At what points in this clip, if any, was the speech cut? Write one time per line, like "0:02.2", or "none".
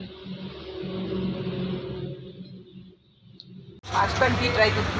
0:03.9